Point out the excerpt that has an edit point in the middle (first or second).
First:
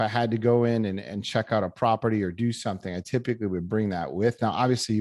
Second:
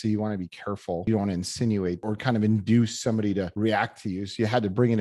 second